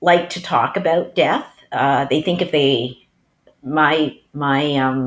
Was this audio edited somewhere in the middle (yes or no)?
no